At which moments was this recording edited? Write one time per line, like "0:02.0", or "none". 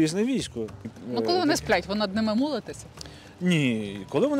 0:00.9